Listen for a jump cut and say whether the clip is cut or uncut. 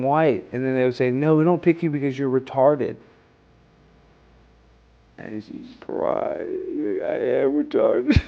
uncut